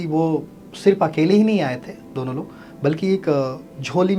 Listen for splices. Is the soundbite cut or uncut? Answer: uncut